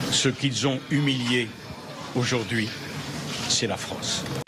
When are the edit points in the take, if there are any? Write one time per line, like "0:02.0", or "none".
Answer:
none